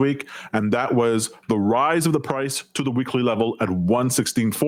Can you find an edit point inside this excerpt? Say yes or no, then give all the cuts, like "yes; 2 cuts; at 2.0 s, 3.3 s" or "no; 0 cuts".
no; 0 cuts